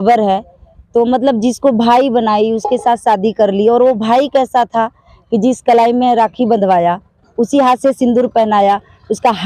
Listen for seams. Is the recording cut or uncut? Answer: uncut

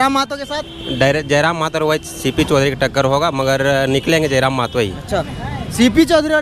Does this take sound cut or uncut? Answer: uncut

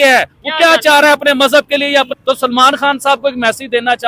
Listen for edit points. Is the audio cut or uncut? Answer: cut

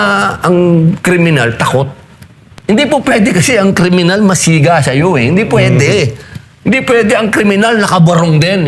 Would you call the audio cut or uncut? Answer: uncut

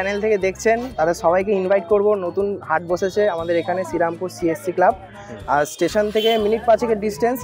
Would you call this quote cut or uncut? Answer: uncut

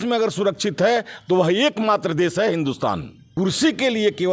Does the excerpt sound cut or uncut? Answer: cut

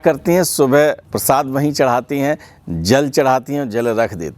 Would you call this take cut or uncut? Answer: cut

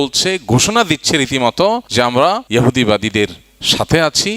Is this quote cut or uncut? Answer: cut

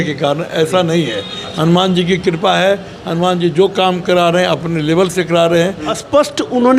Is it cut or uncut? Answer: cut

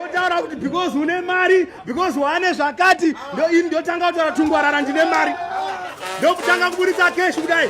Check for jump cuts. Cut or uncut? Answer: uncut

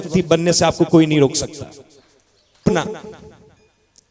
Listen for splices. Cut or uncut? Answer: cut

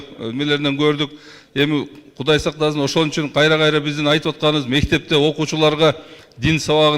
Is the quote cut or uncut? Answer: uncut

